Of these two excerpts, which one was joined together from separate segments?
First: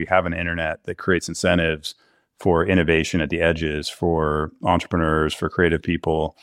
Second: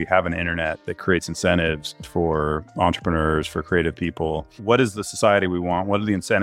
second; 2 cuts; at 2.0 s, 4.6 s

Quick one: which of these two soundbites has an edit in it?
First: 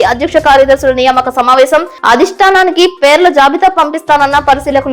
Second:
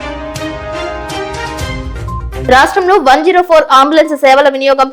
second; 1 cut; at 2.4 s

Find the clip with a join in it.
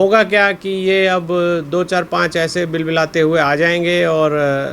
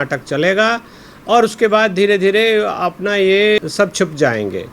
second; 1 cut; at 3.6 s

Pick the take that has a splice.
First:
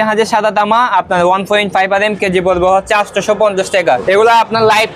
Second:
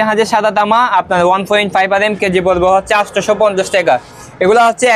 first; 1 cut; at 4.0 s

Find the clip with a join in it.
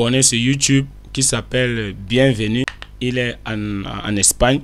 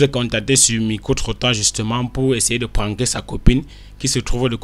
first; 1 cut; at 2.8 s

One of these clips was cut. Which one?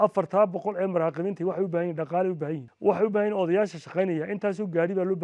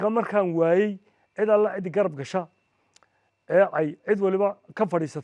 first; 1 cut; at 2.6 s

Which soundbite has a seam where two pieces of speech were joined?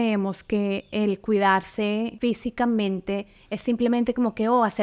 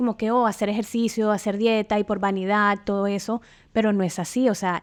first; 1 cut; at 2.1 s

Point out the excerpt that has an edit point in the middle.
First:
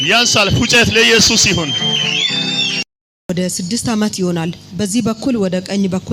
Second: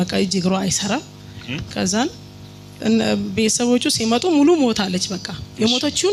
first; 1 cut; at 3.3 s

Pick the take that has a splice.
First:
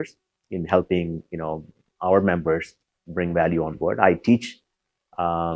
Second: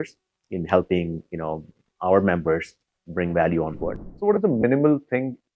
second; 1 cut; at 3.8 s

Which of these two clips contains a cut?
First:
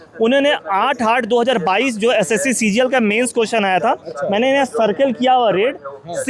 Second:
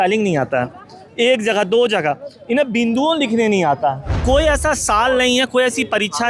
second; 1 cut; at 4.2 s

